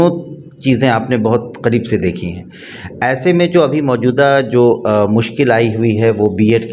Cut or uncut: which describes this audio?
uncut